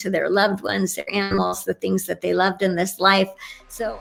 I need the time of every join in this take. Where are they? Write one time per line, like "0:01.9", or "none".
none